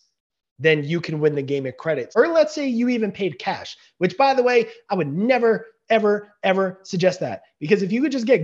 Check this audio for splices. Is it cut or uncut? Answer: cut